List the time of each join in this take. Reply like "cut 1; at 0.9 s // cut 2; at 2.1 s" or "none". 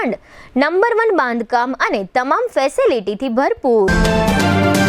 cut 1; at 3.9 s